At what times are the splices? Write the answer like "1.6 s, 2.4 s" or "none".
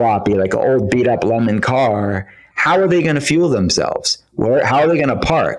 none